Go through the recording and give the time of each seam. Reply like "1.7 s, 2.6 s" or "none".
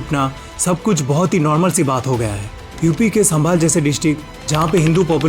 2.5 s